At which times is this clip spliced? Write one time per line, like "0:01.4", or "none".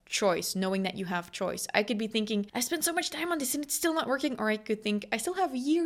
0:02.5